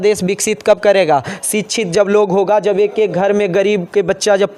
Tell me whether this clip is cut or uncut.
uncut